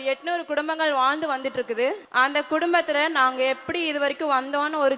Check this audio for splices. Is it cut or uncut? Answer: cut